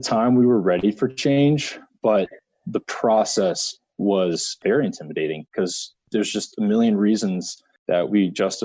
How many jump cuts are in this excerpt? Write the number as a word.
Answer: zero